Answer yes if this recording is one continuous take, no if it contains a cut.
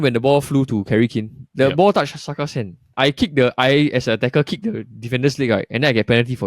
no